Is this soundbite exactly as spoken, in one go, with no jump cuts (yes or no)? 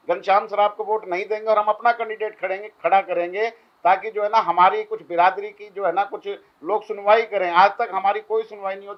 yes